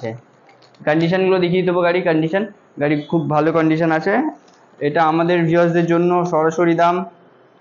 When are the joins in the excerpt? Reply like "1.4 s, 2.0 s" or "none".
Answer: none

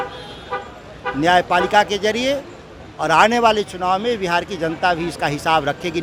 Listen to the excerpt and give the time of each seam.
none

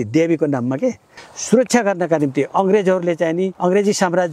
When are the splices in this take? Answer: 1.1 s, 3.5 s

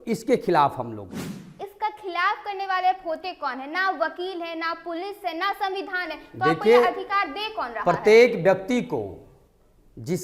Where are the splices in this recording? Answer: 1.6 s

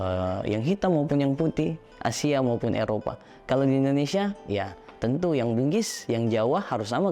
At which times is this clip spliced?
none

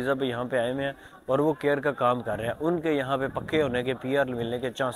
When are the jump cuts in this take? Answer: none

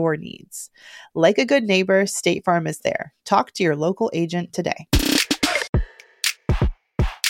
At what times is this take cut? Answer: 5.7 s

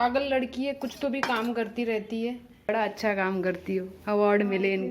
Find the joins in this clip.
2.7 s

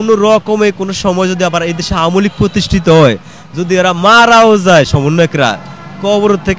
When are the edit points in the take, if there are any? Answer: none

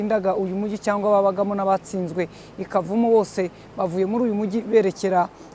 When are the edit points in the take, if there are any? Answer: none

